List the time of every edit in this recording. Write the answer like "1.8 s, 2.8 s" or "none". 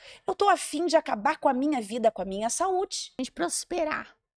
3.1 s